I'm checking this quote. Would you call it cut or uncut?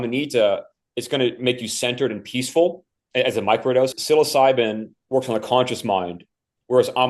cut